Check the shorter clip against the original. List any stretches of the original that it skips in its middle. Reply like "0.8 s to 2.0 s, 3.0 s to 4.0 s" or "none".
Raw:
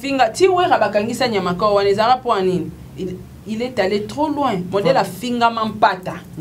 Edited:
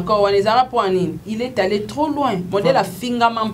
2.7 s to 3.4 s